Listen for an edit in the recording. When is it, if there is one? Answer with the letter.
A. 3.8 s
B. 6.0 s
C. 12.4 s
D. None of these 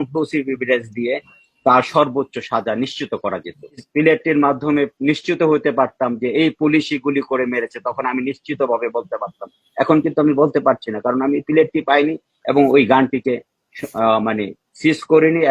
A